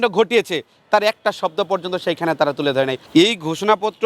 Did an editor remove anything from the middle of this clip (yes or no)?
yes